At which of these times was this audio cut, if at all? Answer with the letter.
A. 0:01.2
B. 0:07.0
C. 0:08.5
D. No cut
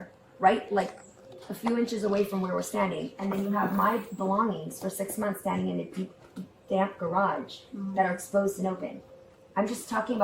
D